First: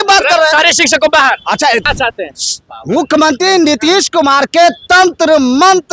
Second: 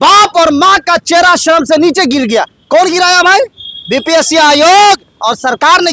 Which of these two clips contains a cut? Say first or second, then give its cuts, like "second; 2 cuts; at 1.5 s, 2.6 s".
first; 1 cut; at 1.9 s